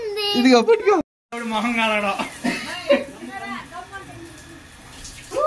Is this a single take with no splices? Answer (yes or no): yes